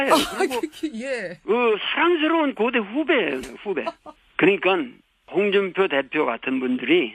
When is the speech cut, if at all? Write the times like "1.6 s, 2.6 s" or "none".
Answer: 4.2 s